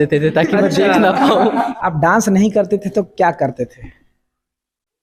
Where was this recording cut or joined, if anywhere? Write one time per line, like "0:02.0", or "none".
0:01.7